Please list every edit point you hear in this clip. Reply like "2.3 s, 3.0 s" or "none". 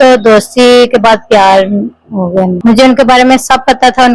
2.5 s

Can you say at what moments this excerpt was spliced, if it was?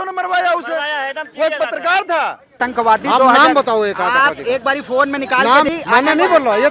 2.6 s, 5.7 s

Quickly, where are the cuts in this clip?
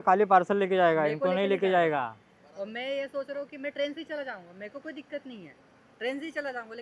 none

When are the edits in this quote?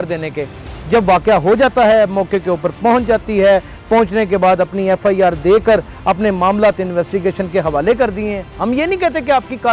8.5 s

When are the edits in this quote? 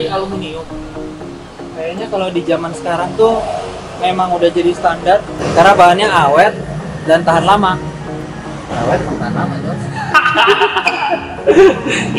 none

